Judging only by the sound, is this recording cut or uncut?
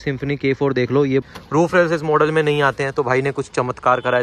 cut